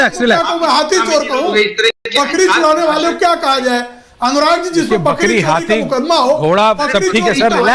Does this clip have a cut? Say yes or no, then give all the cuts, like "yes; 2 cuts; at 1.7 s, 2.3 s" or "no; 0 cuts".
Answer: no; 0 cuts